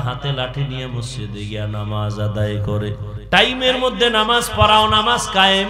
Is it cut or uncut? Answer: cut